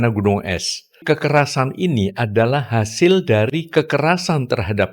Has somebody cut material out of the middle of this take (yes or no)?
yes